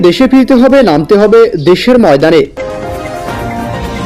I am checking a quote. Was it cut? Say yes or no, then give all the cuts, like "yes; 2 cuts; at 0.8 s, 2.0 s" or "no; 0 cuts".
yes; 1 cut; at 2.5 s